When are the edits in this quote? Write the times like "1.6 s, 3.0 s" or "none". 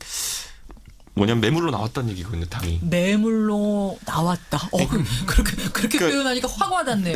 none